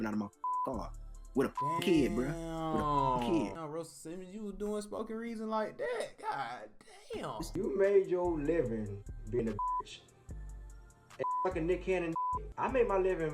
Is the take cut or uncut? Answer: cut